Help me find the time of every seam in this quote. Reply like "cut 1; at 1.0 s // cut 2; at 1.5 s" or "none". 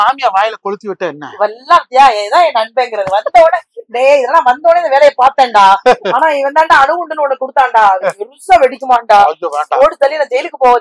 none